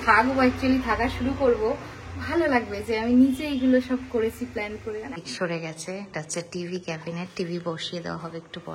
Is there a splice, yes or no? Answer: yes